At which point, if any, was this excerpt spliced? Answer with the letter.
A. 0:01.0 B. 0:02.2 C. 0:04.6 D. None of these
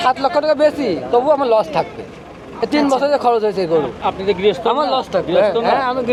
D